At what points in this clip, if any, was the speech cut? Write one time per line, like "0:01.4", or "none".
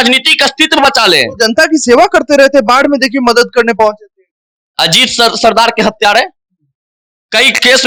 none